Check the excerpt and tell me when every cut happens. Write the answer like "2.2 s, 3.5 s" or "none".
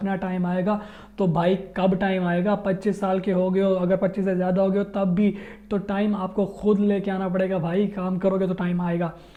none